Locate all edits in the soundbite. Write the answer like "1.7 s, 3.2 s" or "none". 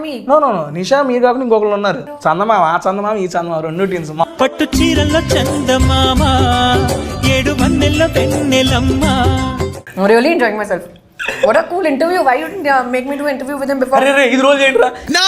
2.1 s, 4.2 s, 9.8 s